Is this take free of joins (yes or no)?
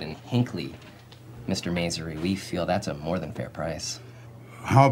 yes